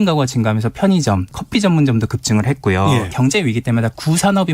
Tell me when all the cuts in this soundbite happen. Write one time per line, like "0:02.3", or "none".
0:01.3
0:03.1